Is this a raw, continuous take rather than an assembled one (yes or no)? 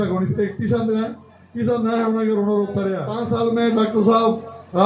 no